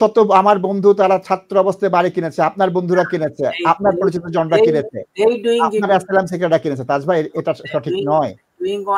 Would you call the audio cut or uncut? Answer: uncut